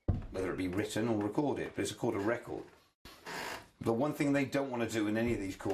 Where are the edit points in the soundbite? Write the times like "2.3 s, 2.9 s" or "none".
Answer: 2.3 s